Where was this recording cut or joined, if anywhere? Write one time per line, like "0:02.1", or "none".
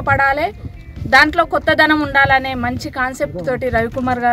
none